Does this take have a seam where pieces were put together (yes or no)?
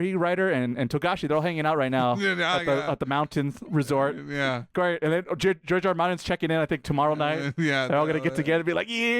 no